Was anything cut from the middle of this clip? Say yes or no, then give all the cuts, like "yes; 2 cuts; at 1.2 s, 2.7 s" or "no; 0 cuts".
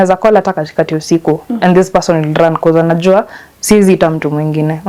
no; 0 cuts